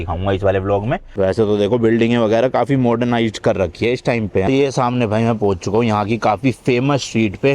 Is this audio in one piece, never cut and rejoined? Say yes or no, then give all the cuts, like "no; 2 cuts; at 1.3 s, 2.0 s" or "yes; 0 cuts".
no; 2 cuts; at 1.1 s, 4.4 s